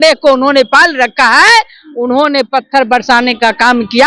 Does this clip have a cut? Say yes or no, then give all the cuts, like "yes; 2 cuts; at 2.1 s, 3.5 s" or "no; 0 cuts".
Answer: no; 0 cuts